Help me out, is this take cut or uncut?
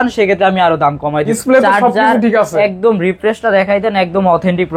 cut